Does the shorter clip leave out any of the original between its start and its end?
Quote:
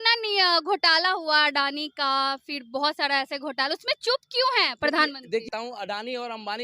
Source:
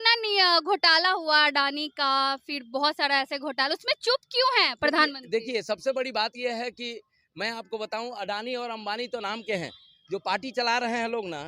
yes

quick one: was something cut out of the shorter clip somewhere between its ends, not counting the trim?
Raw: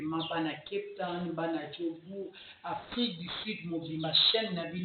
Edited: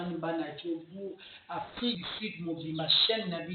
yes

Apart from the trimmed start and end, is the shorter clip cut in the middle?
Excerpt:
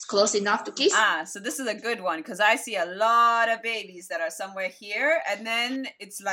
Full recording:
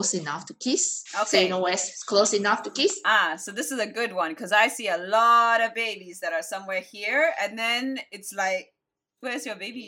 yes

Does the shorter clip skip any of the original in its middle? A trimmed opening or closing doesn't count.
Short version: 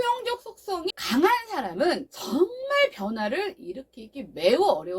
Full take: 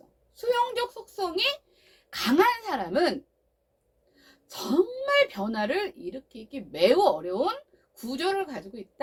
yes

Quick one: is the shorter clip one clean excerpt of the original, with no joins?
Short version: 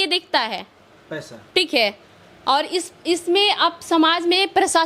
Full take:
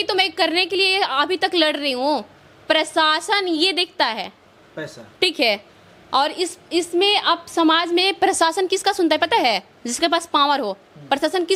yes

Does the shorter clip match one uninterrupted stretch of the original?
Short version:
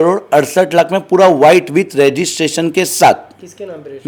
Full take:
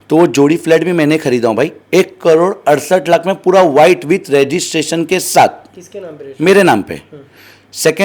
yes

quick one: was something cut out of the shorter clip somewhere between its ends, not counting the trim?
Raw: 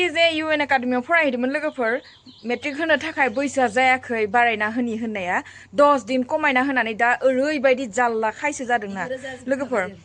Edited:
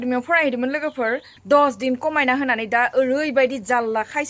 yes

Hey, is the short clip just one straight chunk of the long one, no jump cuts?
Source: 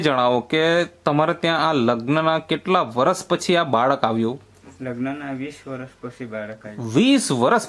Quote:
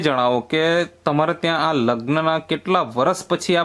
yes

